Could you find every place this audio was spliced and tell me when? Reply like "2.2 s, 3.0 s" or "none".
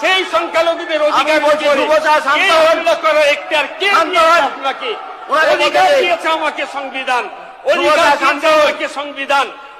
none